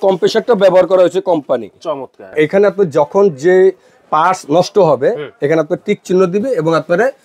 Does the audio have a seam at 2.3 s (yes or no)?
yes